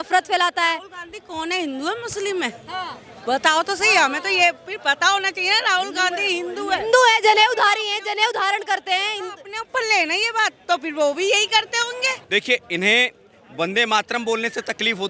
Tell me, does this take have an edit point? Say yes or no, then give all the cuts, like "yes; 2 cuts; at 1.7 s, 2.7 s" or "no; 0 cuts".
yes; 1 cut; at 12.2 s